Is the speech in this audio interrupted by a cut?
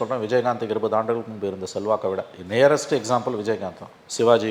no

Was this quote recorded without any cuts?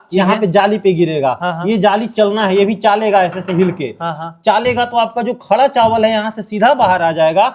yes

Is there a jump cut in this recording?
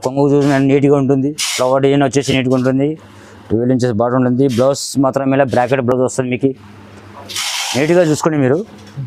no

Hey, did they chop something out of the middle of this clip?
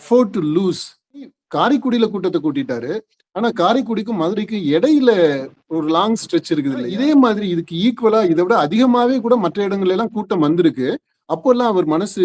yes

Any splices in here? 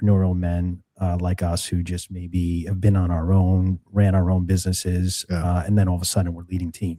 no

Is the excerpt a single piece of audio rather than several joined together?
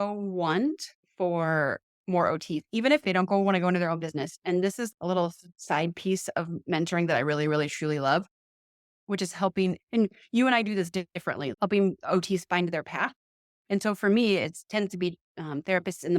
no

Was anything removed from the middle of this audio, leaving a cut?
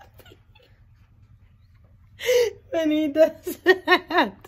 no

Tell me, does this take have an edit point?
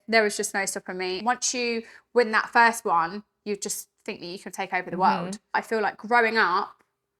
yes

